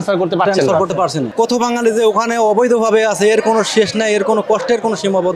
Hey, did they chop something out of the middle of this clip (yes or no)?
yes